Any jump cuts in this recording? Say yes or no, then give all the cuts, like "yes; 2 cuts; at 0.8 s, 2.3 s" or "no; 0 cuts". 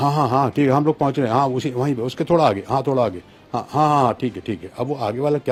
no; 0 cuts